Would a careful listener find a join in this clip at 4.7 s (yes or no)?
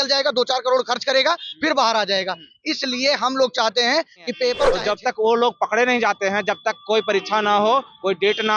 yes